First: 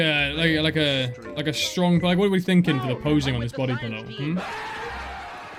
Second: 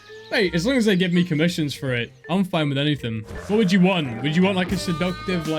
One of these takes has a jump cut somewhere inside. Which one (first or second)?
second